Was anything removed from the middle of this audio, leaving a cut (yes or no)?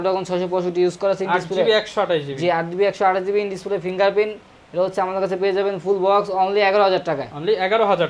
no